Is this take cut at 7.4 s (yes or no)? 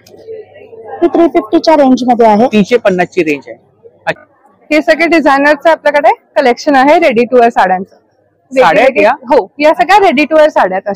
no